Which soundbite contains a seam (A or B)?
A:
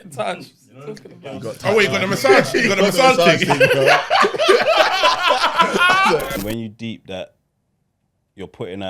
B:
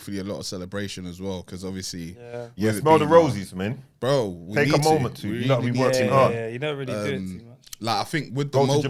A